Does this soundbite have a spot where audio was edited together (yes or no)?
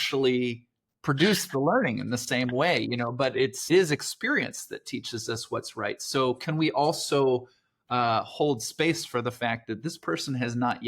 yes